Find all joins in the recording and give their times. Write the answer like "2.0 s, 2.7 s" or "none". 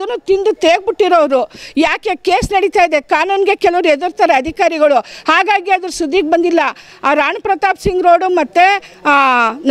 none

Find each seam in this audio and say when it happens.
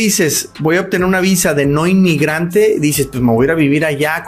none

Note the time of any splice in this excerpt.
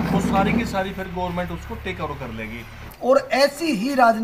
2.8 s

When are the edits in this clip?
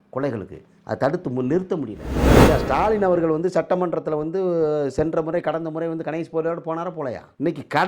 2.1 s, 2.6 s

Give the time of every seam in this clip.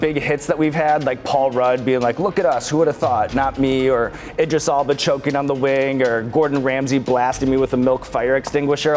none

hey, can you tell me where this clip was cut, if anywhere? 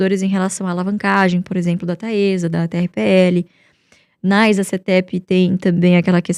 none

